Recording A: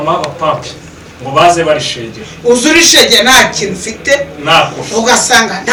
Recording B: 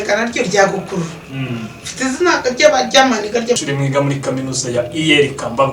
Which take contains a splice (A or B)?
B